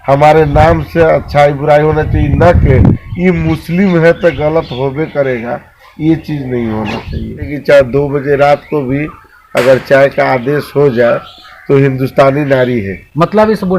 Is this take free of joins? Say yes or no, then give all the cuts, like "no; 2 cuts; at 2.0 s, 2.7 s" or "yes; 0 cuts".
no; 1 cut; at 7.5 s